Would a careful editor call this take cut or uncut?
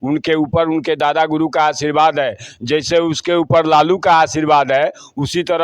uncut